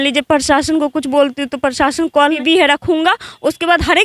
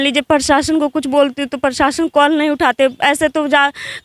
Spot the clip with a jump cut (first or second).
first